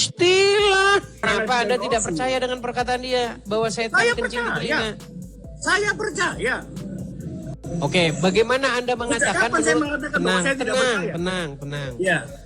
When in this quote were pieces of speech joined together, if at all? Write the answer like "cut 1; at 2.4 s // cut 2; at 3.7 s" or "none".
cut 1; at 1.2 s